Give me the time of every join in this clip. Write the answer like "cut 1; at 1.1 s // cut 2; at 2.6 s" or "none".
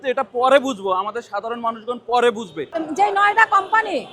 cut 1; at 2.7 s

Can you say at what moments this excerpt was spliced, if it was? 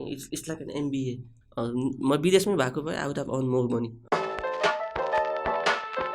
cut 1; at 1.3 s // cut 2; at 4.0 s

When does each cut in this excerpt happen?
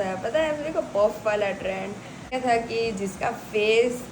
cut 1; at 2.4 s

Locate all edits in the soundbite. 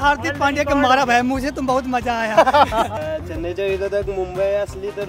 cut 1; at 3.0 s

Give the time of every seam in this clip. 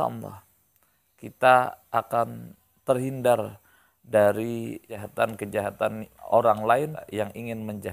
cut 1; at 5.0 s // cut 2; at 7.0 s

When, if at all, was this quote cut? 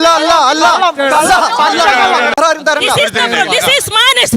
cut 1; at 2.4 s

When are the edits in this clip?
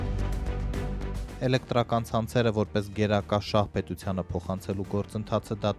cut 1; at 1.4 s

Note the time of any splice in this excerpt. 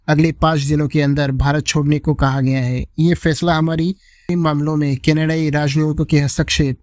cut 1; at 4.3 s

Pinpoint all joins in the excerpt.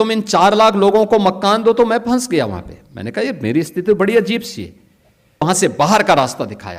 cut 1; at 5.4 s

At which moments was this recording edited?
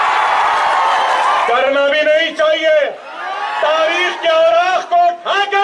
cut 1; at 1.5 s

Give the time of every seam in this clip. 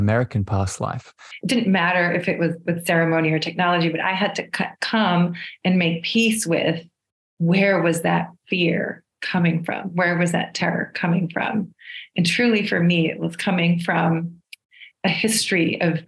cut 1; at 1.3 s

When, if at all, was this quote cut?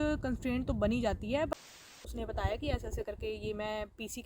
cut 1; at 1.9 s

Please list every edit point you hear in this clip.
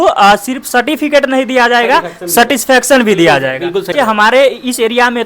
cut 1; at 3.9 s

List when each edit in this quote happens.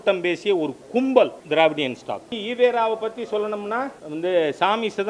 cut 1; at 1.4 s // cut 2; at 2.4 s // cut 3; at 4.0 s

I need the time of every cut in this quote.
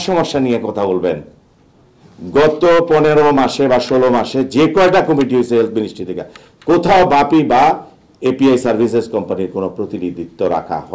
none

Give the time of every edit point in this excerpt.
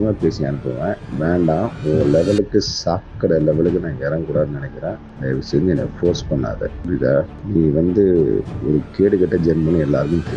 cut 1; at 1.1 s // cut 2; at 5.1 s // cut 3; at 6.7 s // cut 4; at 7.4 s

